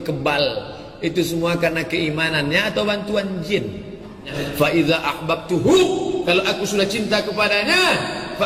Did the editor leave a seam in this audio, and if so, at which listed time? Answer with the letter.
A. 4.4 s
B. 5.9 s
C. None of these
A